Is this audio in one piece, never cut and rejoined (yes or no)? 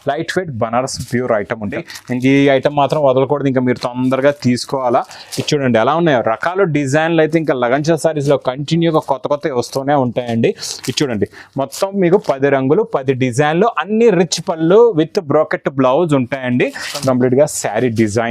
no